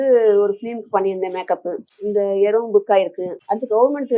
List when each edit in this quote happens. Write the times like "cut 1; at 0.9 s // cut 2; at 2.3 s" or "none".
none